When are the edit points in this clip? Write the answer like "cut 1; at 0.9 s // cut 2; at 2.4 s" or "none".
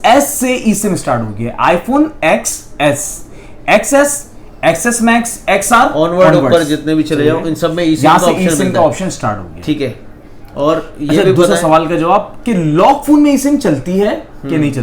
none

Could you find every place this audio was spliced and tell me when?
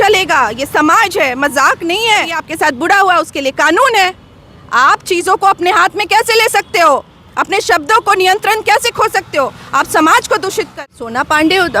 cut 1; at 2.4 s // cut 2; at 10.7 s

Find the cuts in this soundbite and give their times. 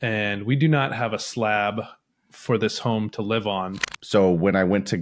cut 1; at 3.9 s

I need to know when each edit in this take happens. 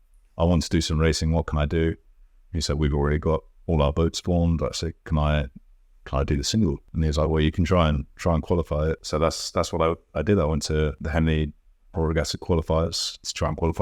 cut 1; at 6.9 s // cut 2; at 9.0 s // cut 3; at 11.0 s

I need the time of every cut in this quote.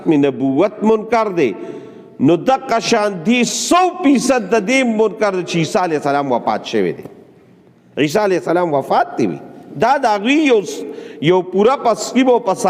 cut 1; at 3.1 s

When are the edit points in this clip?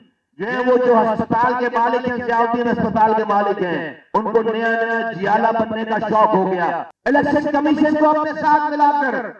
cut 1; at 6.9 s

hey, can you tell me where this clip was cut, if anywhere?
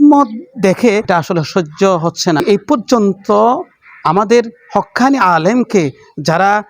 cut 1; at 1.1 s // cut 2; at 2.4 s

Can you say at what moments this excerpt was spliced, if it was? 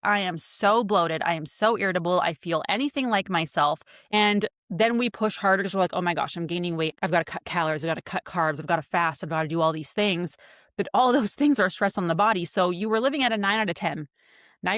cut 1; at 4.1 s // cut 2; at 6.9 s

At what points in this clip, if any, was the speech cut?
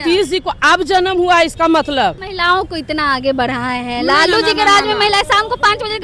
cut 1; at 2.3 s

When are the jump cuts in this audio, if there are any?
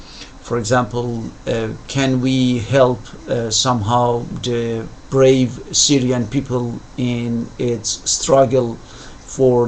cut 1; at 7.5 s

